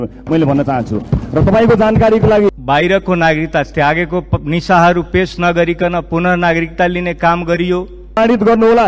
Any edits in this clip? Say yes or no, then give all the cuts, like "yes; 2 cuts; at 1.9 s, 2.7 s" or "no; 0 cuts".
yes; 2 cuts; at 2.5 s, 8.2 s